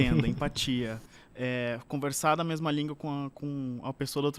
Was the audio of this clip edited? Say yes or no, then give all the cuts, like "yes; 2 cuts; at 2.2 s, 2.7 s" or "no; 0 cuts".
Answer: no; 0 cuts